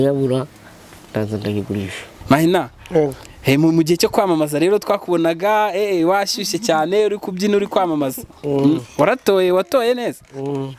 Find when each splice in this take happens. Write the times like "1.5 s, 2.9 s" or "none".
2.1 s